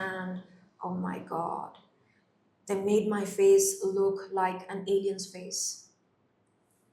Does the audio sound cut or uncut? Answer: uncut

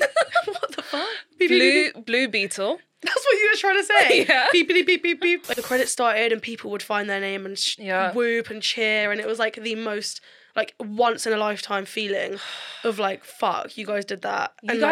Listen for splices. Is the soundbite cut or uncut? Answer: cut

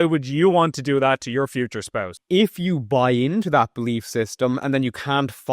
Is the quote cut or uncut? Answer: cut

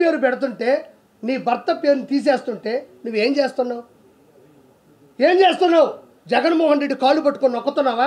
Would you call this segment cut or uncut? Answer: uncut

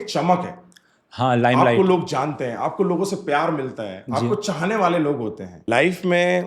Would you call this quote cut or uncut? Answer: cut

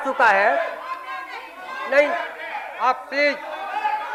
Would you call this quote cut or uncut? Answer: uncut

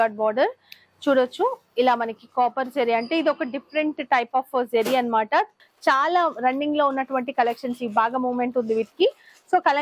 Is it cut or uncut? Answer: cut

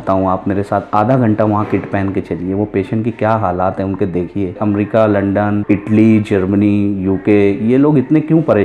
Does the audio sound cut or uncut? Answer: cut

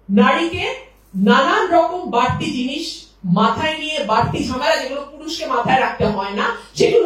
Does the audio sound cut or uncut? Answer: uncut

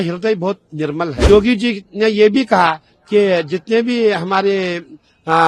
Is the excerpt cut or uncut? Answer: cut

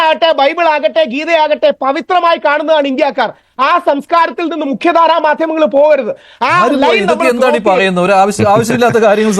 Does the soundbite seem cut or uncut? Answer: uncut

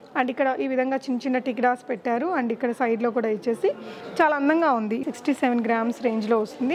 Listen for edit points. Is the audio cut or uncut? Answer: cut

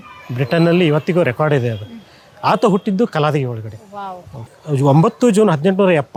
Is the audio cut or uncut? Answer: uncut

